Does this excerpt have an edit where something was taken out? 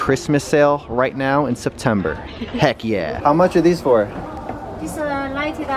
yes; 1 cut; at 3.1 s

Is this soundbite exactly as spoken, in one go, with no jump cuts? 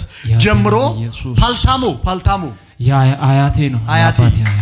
yes; 0 cuts

